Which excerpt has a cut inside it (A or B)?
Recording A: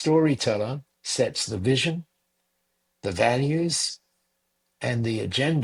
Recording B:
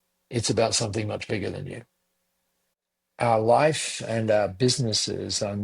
B